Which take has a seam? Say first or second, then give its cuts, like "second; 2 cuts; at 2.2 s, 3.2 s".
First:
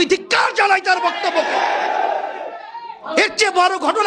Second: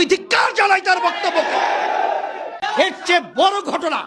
second; 1 cut; at 2.6 s